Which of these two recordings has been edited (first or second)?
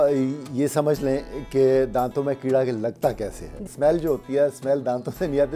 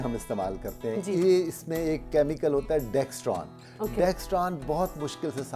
first